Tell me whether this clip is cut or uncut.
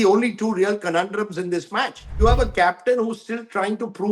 cut